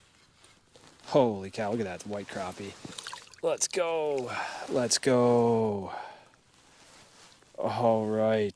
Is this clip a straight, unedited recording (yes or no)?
yes